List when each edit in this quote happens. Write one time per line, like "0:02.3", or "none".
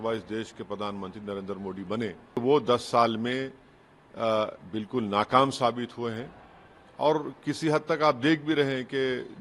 0:02.4